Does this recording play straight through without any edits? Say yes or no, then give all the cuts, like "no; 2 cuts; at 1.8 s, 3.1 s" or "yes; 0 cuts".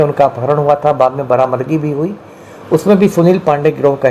yes; 0 cuts